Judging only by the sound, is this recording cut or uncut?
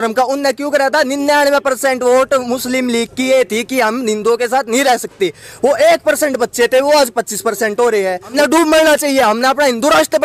cut